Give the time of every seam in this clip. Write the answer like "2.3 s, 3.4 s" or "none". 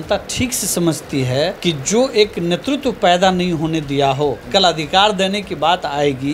1.6 s, 4.4 s